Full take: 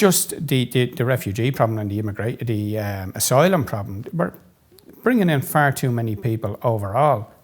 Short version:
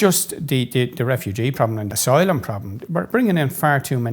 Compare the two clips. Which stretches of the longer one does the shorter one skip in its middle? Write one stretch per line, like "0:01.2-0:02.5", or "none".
0:01.9-0:03.1
0:04.3-0:05.0